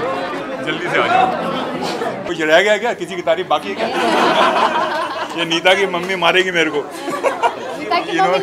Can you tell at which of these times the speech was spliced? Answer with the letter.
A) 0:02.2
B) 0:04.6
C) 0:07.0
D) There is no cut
A